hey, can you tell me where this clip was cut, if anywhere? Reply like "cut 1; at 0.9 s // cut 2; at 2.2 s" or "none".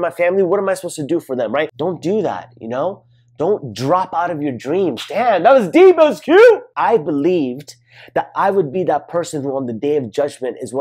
cut 1; at 1.7 s // cut 2; at 6.7 s

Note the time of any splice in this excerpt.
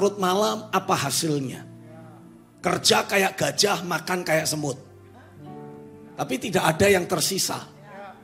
none

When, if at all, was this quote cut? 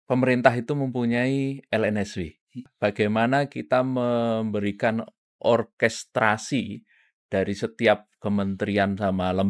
cut 1; at 2.7 s

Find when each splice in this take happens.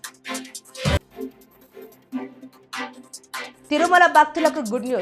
cut 1; at 1.0 s

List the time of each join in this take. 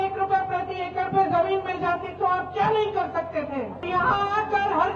cut 1; at 3.8 s

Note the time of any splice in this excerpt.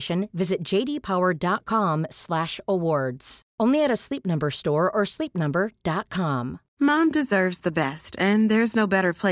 cut 1; at 6.6 s

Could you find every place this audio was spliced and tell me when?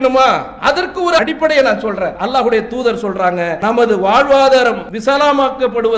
cut 1; at 1.2 s // cut 2; at 2.2 s // cut 3; at 3.6 s // cut 4; at 4.9 s

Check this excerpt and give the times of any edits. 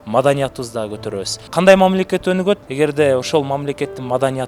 cut 1; at 1.3 s // cut 2; at 2.7 s

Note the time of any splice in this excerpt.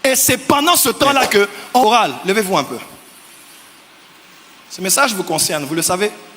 cut 1; at 1.8 s

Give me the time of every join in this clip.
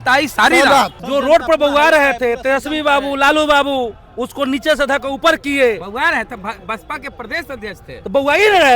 cut 1; at 1.0 s

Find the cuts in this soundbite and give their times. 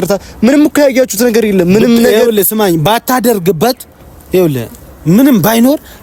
none

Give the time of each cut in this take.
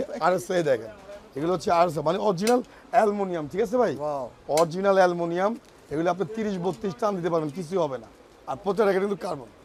none

